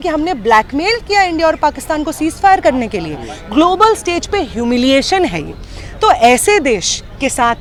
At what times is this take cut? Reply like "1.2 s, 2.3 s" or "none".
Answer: none

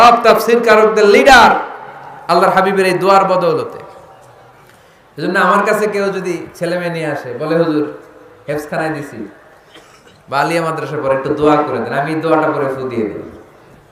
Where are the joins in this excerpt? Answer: none

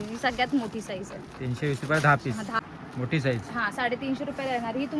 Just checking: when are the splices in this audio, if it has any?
2.6 s

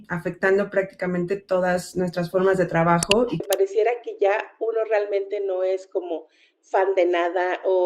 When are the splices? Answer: 3.4 s

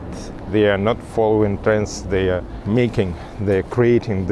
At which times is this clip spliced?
2.5 s

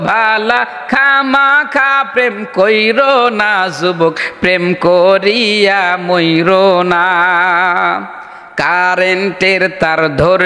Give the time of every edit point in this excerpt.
none

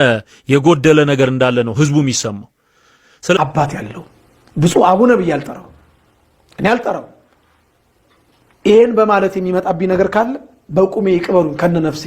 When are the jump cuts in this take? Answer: 3.4 s

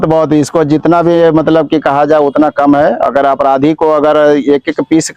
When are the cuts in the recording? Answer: none

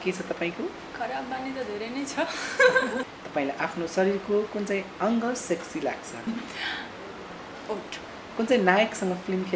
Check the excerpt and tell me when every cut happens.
3.1 s, 6.3 s, 8.2 s

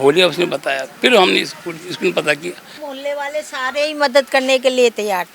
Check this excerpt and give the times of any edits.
2.9 s

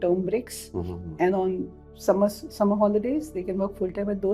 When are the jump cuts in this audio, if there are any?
none

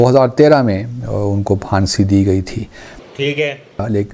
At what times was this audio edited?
none

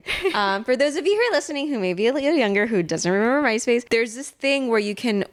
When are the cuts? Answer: none

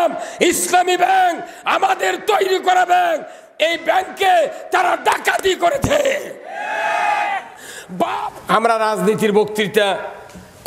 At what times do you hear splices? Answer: 8.3 s

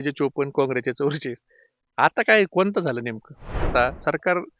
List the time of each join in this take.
3.7 s

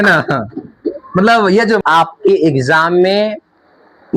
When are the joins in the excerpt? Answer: 1.8 s

